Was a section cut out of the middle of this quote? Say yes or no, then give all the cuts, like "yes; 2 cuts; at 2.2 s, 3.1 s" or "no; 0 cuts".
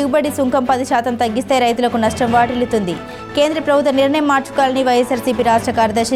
no; 0 cuts